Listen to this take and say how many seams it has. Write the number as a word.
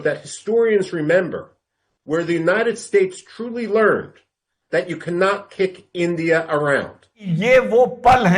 one